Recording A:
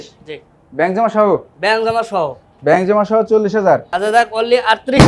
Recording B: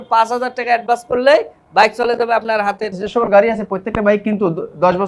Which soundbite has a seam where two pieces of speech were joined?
B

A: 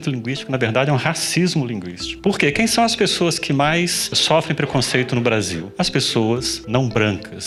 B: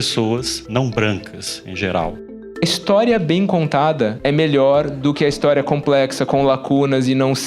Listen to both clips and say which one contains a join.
B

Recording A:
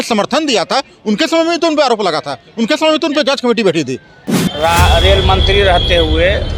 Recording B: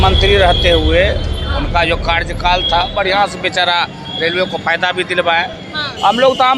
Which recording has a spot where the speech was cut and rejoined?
A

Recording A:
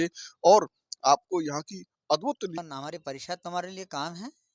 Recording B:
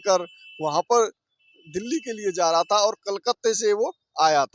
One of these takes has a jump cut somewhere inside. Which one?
A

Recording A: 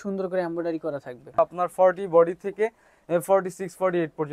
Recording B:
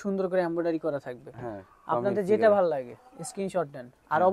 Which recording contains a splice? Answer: A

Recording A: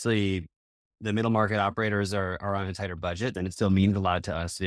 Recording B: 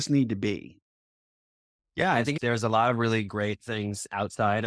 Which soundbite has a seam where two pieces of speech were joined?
A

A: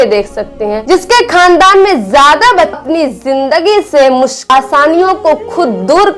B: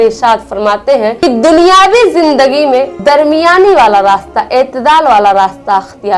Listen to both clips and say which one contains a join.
A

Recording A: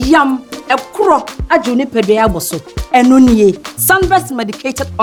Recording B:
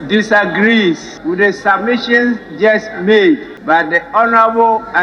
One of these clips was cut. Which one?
B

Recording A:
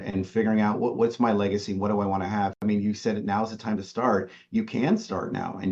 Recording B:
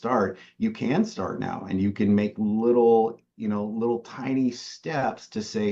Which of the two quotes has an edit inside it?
A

